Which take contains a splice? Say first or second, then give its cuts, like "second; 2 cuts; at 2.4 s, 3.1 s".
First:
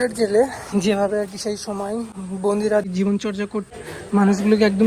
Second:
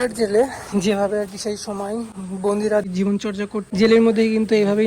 first; 1 cut; at 3.7 s